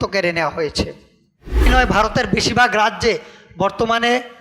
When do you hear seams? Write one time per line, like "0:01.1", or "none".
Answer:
0:01.7